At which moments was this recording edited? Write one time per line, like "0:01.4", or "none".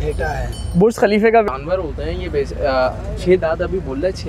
0:01.5

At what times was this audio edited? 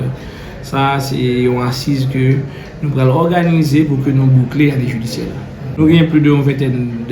0:05.8

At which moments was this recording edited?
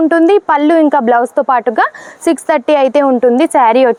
none

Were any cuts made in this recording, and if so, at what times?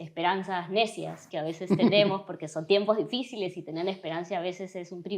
none

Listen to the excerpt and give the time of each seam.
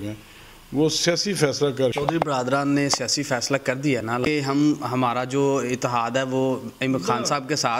0:01.9
0:04.1

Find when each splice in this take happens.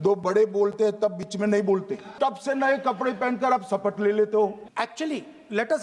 0:02.1
0:04.6

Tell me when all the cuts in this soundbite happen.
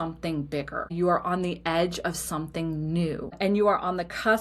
0:00.9
0:03.4

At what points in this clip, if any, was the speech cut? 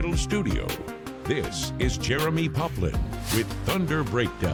none

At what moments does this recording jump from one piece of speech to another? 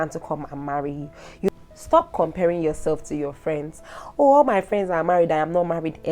0:01.5

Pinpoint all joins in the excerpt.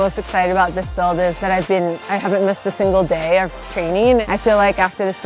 0:01.4
0:04.2

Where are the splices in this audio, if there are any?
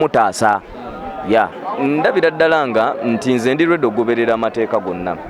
0:01.6

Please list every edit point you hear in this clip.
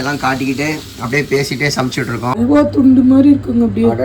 0:02.4

